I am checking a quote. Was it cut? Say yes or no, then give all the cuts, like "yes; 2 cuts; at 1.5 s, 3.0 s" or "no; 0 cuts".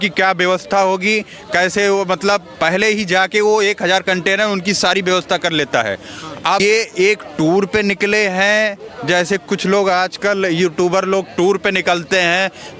yes; 1 cut; at 6.6 s